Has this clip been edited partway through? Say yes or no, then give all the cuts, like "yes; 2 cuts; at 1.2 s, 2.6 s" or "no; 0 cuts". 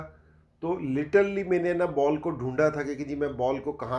no; 0 cuts